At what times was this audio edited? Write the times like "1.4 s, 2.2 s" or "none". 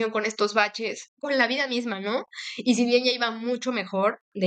1.1 s